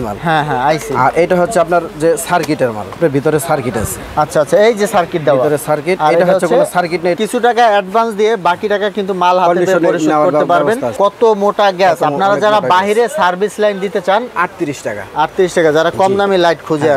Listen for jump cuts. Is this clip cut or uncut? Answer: cut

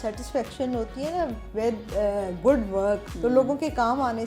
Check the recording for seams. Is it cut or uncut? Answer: cut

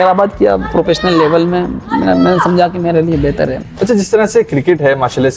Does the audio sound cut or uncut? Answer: cut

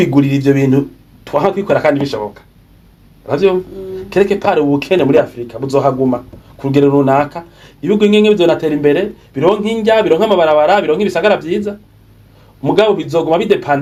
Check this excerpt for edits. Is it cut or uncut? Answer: uncut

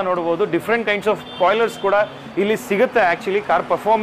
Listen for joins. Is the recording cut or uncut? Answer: uncut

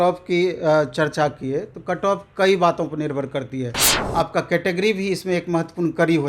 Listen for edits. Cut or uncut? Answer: cut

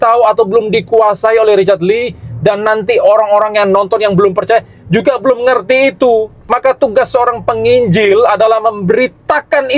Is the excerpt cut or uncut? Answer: cut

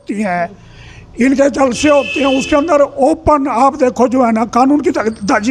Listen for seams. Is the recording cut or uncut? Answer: uncut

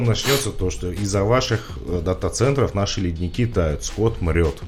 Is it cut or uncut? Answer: uncut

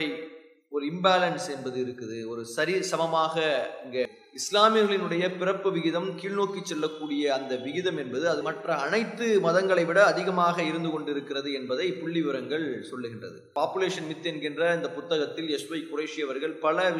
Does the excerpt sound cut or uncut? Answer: cut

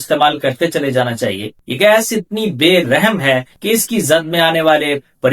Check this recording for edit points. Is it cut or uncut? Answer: cut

